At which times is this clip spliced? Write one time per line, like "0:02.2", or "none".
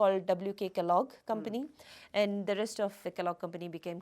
0:03.0